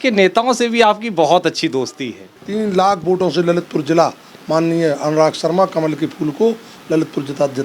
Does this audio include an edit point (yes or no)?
yes